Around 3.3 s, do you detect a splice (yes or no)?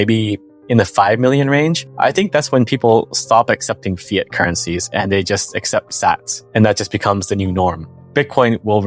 no